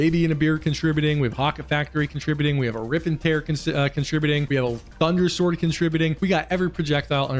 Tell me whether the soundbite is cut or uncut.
cut